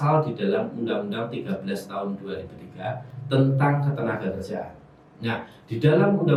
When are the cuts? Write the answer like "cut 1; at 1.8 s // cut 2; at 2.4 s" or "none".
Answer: none